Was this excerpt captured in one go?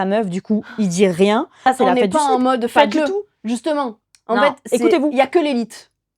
no; 1 cut; at 1.6 s

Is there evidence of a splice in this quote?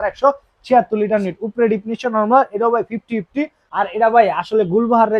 yes; 1 cut; at 3.6 s

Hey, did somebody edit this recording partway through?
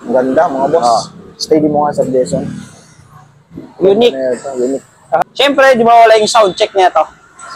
yes; 1 cut; at 5.2 s

